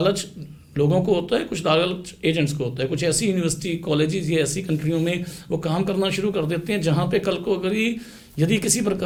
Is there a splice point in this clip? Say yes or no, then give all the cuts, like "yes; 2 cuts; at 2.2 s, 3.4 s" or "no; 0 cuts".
no; 0 cuts